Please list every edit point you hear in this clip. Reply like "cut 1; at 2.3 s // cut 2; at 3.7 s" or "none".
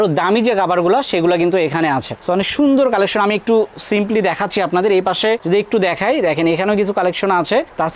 none